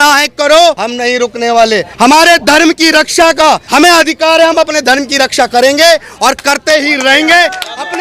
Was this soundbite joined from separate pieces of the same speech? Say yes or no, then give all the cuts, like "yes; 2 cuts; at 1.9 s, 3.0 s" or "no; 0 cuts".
yes; 3 cuts; at 0.9 s, 1.9 s, 3.6 s